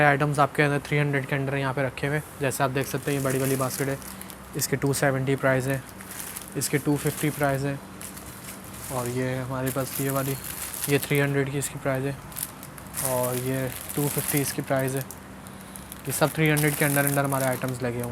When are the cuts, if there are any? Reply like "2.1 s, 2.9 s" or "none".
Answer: none